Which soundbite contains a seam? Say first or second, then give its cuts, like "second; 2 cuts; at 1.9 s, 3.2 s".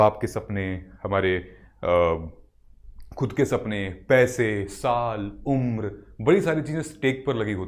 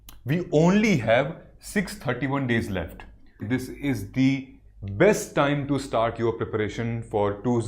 second; 1 cut; at 3.4 s